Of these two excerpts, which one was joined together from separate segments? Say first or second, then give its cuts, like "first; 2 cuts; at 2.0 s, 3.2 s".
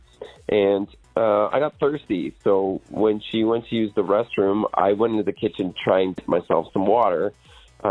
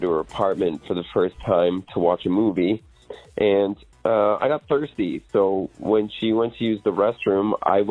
first; 1 cut; at 6.2 s